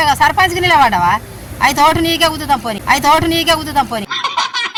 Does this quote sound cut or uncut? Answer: uncut